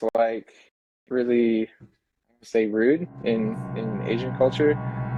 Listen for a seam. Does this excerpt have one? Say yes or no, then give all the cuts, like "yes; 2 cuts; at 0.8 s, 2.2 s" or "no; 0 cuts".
no; 0 cuts